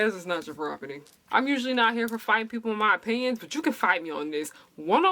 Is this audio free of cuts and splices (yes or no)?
no